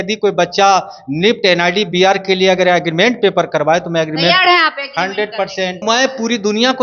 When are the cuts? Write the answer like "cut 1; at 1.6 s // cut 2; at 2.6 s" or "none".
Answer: cut 1; at 5.8 s